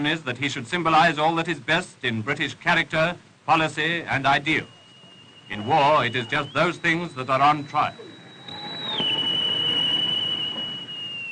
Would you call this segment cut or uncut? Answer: uncut